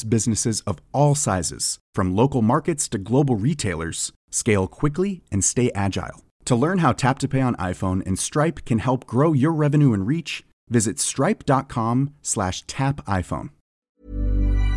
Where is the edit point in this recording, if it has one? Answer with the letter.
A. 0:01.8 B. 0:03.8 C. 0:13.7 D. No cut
C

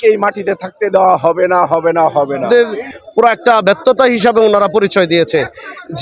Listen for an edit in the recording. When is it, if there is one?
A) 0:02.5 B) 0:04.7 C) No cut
A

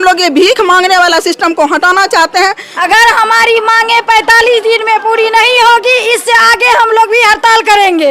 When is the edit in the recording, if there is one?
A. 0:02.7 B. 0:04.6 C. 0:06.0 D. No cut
A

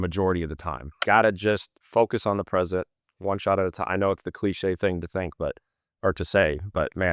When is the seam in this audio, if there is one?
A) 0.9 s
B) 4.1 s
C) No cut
A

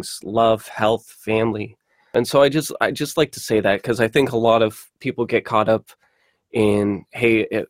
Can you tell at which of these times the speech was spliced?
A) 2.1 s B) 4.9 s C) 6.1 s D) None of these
A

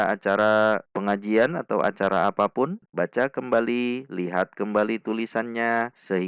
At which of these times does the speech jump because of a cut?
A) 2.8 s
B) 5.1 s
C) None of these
A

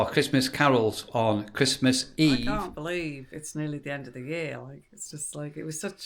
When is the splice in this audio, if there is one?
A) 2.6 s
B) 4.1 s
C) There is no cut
A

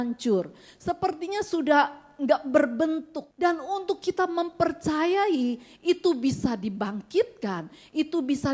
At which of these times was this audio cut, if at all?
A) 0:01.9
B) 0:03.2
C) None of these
B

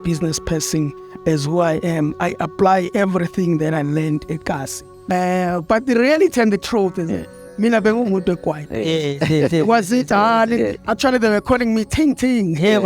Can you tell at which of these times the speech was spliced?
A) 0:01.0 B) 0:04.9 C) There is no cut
B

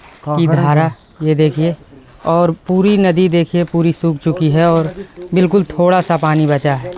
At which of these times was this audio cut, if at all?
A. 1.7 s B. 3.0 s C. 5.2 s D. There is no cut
D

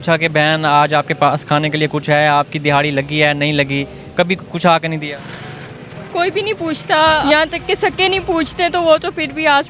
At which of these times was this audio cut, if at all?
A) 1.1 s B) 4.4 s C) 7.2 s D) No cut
C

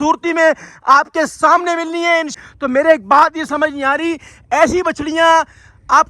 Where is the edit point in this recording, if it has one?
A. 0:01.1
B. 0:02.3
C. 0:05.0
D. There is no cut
B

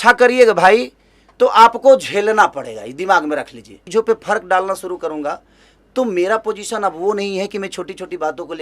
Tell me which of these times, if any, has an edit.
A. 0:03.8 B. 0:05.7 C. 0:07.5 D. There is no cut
A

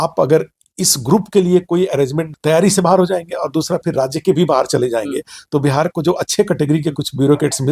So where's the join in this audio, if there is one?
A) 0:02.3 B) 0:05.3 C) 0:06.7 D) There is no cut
A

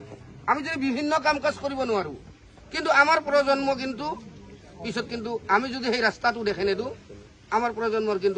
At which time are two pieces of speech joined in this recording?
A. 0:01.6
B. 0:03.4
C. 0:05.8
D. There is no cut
D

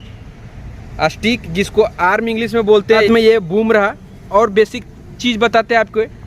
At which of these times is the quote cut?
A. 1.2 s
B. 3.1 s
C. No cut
B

